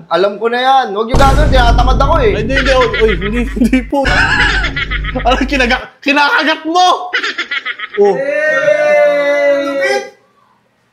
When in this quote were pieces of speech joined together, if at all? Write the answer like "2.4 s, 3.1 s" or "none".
4.1 s